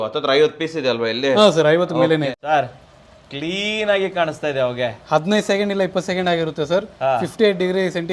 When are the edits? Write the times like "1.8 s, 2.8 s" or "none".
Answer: 2.3 s